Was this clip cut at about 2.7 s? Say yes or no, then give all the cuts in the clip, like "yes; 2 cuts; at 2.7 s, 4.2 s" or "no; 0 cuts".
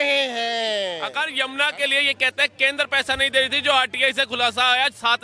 no; 1 cut; at 1.1 s